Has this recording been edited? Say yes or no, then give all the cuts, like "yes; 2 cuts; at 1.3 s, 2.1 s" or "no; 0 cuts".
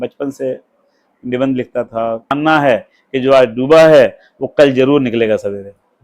yes; 1 cut; at 2.3 s